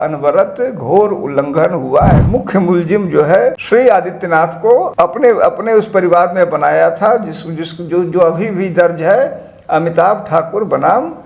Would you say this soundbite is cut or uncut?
cut